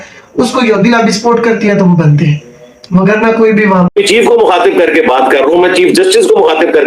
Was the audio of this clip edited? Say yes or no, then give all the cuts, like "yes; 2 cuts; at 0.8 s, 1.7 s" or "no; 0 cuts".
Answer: yes; 1 cut; at 3.9 s